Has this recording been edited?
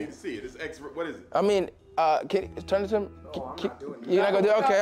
no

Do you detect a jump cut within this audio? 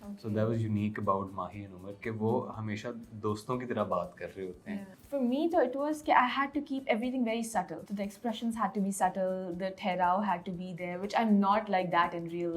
yes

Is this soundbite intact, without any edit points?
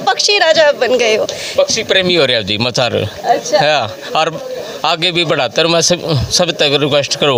yes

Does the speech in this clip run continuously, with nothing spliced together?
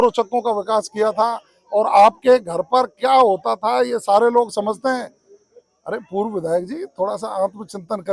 yes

